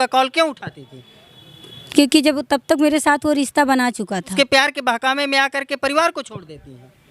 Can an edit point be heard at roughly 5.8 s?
no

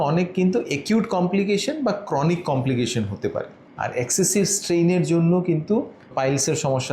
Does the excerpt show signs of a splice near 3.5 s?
yes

